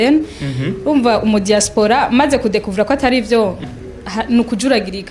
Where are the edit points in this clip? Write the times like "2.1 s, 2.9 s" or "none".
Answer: 3.7 s